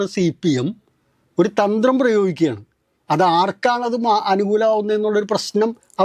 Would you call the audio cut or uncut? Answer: uncut